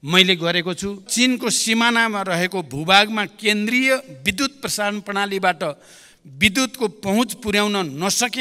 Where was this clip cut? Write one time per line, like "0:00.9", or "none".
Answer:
0:01.1